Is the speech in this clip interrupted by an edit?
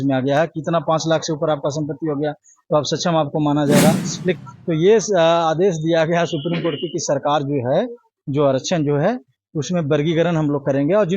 yes; 1 cut; at 4.4 s

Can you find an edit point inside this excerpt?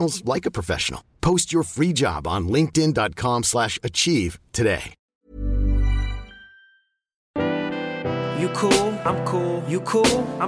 yes; 2 cuts; at 5.0 s, 7.3 s

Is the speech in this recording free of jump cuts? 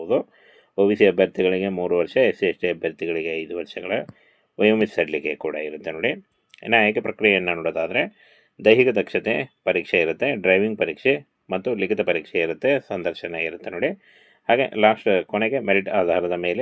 yes; 0 cuts

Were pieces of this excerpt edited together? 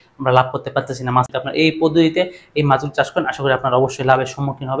yes; 1 cut; at 1.4 s

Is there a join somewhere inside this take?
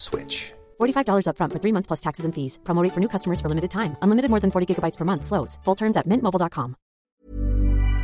yes; 1 cut; at 7.1 s

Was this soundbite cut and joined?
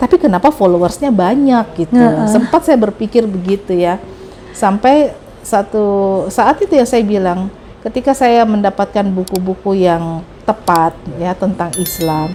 no; 0 cuts

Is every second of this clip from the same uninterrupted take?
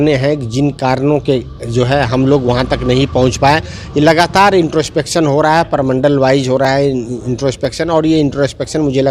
yes; 0 cuts

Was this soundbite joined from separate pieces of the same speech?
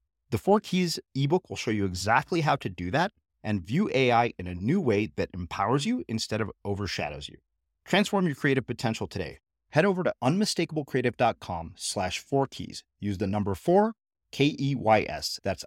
no; 0 cuts

